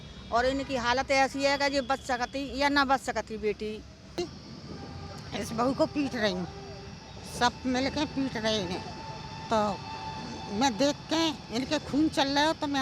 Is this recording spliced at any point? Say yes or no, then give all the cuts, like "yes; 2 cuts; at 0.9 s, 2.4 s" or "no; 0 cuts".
yes; 1 cut; at 4.2 s